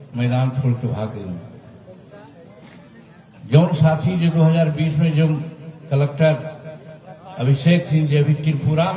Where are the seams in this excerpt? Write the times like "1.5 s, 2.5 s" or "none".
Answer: none